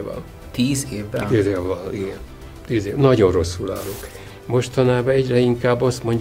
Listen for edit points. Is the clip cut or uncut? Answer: cut